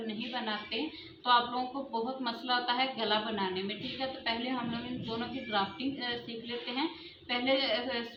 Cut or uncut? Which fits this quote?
uncut